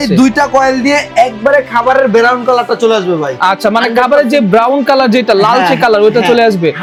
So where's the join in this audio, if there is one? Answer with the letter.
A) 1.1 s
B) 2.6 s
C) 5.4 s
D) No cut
D